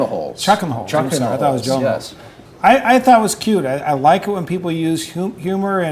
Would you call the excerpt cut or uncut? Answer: cut